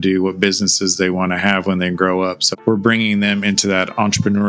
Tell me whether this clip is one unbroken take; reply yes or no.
yes